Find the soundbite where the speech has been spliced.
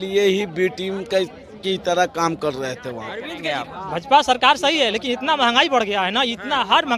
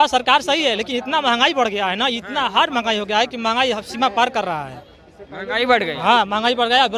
first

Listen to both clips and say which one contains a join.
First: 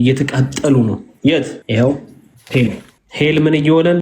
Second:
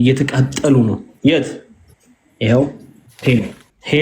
first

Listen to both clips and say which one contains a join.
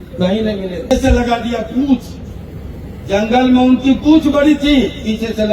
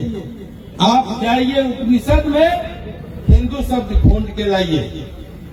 first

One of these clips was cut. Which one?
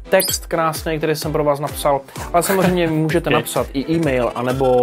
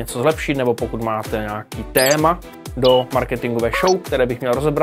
first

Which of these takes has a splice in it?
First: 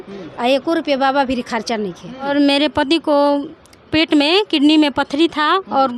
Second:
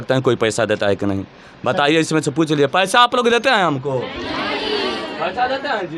first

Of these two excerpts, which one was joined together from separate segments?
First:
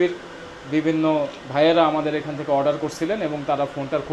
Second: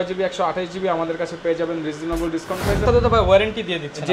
second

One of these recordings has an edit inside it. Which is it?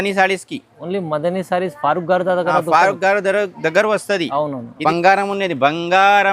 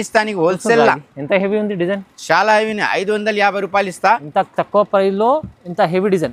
first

